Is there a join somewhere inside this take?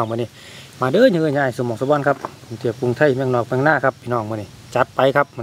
no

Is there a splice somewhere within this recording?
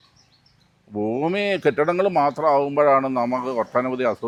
no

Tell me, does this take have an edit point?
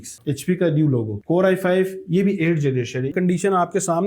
yes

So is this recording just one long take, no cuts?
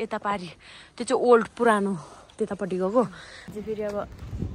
no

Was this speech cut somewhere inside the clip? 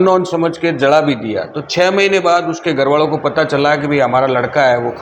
no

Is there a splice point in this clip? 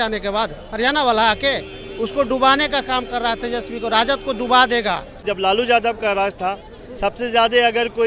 yes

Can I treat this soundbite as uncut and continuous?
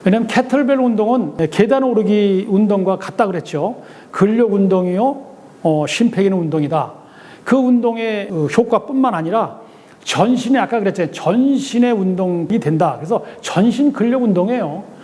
no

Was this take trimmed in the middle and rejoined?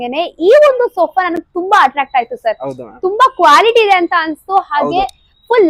no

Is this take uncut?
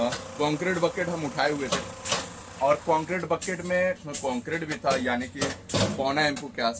no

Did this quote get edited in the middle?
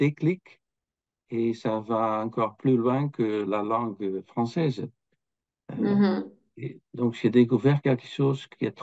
no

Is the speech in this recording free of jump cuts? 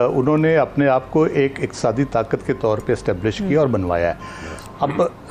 yes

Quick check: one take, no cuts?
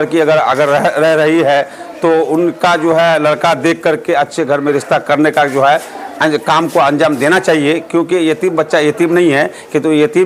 yes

